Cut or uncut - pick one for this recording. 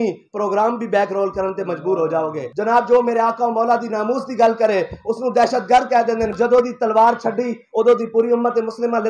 cut